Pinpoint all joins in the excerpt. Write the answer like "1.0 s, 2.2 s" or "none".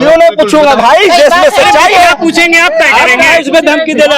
none